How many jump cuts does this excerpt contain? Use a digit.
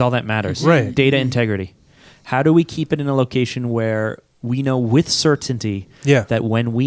0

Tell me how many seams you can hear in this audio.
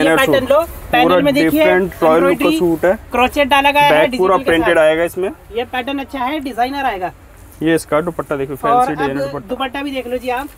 0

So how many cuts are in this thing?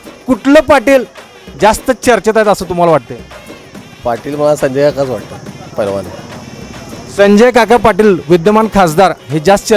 0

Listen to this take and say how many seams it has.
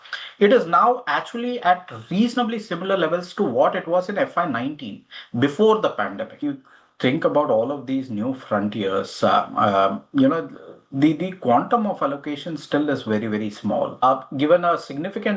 2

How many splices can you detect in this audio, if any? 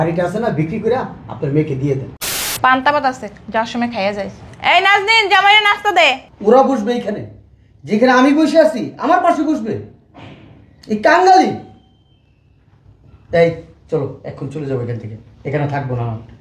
2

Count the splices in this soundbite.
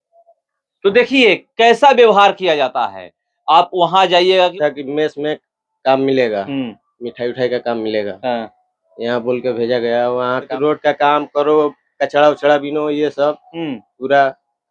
2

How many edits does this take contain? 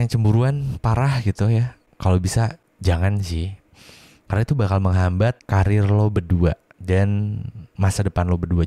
4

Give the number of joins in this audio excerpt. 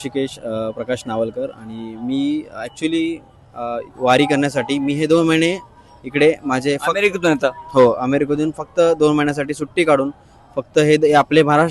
1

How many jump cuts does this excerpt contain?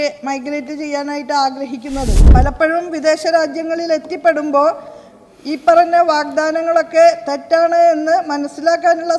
1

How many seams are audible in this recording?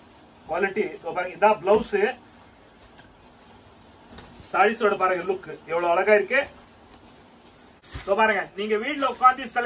1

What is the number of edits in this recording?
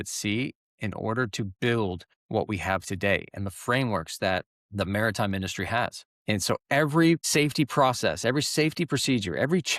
4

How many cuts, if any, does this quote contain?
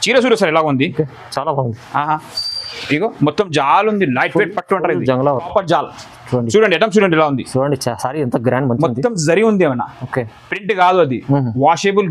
1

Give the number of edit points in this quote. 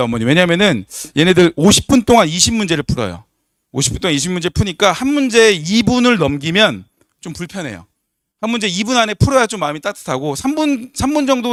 0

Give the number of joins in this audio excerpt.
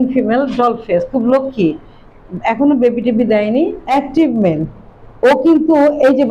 1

